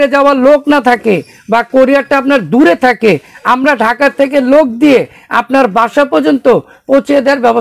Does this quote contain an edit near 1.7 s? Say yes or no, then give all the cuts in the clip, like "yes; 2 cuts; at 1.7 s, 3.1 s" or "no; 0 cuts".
no; 0 cuts